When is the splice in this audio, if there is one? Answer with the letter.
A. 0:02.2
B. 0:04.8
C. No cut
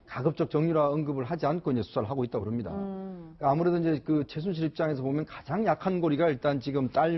B